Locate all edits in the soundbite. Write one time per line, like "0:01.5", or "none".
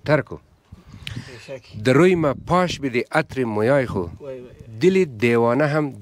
none